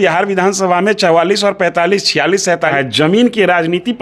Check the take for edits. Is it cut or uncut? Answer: cut